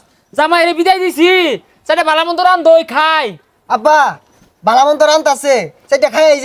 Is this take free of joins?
yes; 0 cuts

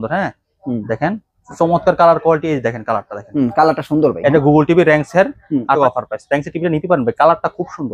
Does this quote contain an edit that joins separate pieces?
yes; 1 cut; at 5.8 s

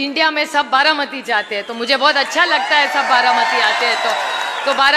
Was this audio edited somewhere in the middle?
no; 0 cuts

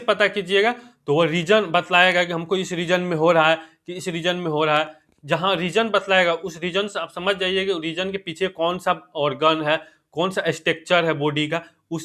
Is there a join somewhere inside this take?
no; 0 cuts

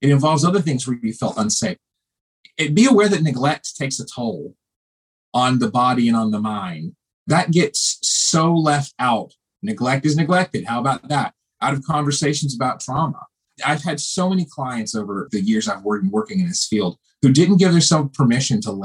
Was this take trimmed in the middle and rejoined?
yes; 2 cuts; at 13.6 s, 15.2 s

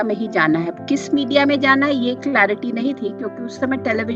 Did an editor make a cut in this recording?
no; 0 cuts

